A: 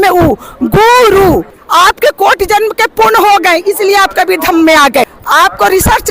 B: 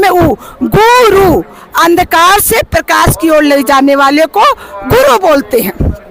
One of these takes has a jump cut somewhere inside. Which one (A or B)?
A